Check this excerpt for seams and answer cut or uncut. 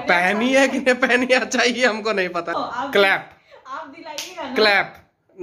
cut